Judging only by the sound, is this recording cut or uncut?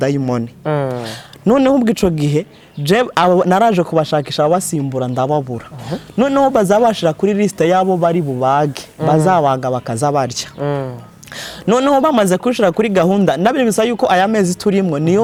uncut